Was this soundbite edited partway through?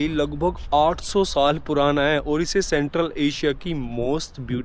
no; 0 cuts

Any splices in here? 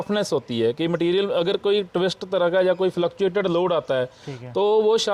no; 0 cuts

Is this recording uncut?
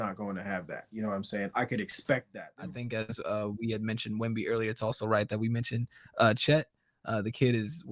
no; 1 cut; at 2.4 s

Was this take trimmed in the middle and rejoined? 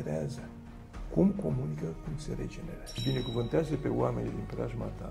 yes; 1 cut; at 3.0 s

